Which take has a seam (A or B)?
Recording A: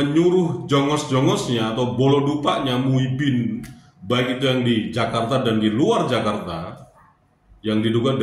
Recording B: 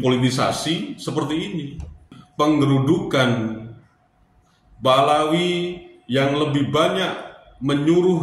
B